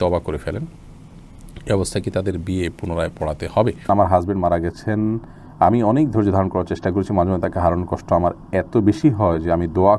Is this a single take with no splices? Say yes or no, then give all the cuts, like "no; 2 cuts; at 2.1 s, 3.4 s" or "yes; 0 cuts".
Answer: no; 1 cut; at 3.8 s